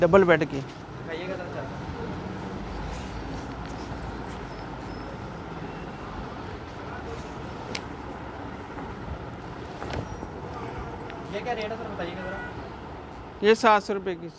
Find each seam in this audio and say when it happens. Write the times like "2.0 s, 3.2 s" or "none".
none